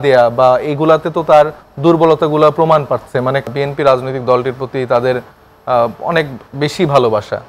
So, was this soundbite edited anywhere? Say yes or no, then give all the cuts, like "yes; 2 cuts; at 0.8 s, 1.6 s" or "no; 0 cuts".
yes; 1 cut; at 3.5 s